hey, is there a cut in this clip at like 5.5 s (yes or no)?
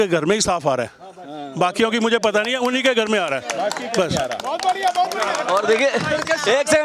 no